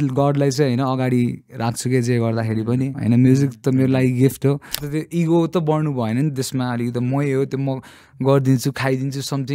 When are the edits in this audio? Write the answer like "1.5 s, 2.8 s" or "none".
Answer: 3.0 s, 4.8 s